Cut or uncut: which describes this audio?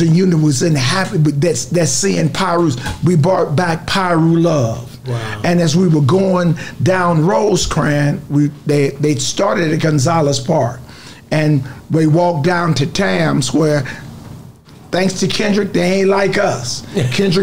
uncut